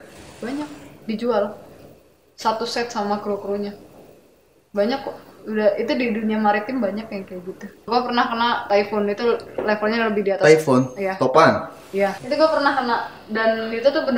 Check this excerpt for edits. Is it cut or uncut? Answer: cut